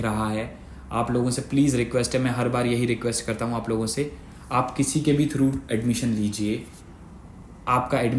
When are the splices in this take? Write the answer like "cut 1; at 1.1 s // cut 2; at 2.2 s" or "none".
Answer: none